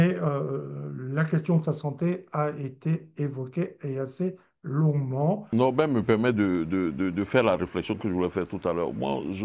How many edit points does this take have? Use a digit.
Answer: 1